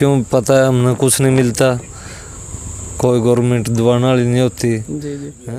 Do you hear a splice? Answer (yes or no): no